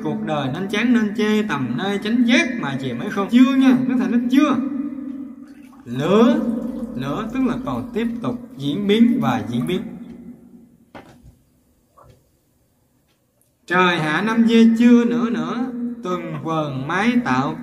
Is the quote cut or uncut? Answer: cut